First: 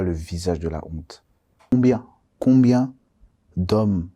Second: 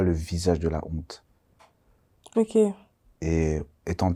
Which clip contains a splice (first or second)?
first